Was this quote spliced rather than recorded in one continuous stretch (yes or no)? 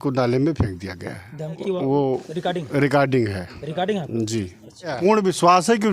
yes